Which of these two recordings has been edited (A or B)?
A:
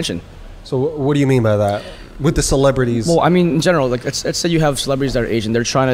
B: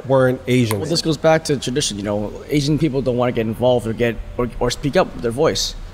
B